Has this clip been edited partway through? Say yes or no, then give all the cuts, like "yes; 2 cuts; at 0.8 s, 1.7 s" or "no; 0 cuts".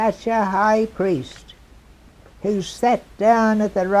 no; 0 cuts